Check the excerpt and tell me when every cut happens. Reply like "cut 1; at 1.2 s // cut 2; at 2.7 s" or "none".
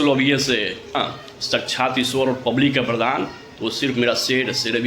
cut 1; at 1.0 s